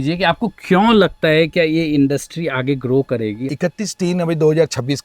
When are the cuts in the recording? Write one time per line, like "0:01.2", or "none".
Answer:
0:03.5